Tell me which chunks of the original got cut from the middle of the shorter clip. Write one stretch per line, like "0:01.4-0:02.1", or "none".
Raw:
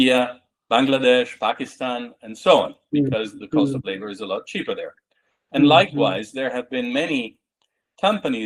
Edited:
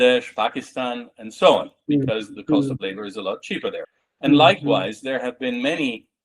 0:05.0-0:05.3